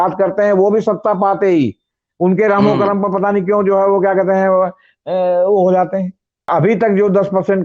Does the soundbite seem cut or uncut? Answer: cut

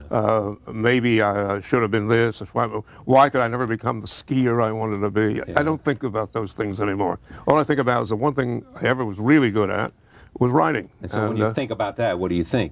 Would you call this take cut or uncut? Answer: uncut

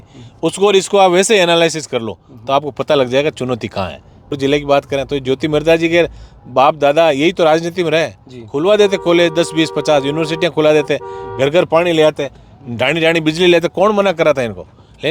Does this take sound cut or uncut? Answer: cut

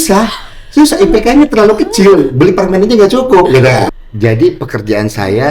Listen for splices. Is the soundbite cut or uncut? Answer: cut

